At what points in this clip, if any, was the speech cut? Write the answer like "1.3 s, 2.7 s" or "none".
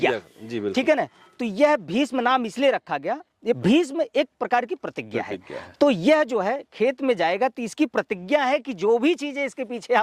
3.6 s